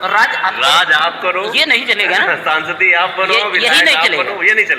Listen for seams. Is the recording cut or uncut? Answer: uncut